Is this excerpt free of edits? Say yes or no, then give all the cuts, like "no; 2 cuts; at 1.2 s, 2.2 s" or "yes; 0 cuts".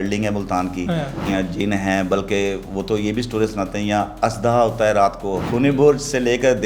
no; 2 cuts; at 1.3 s, 5.5 s